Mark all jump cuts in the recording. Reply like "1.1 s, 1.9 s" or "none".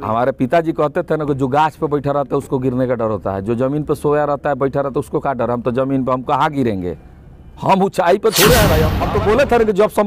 8.9 s